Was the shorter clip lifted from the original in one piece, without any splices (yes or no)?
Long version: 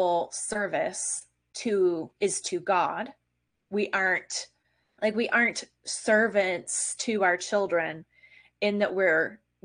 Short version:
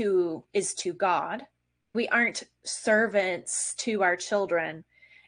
no